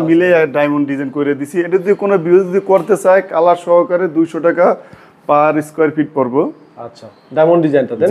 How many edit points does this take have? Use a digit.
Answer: 0